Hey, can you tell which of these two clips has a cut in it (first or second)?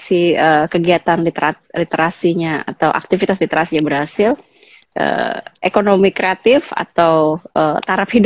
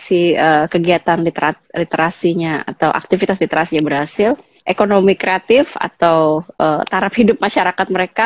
second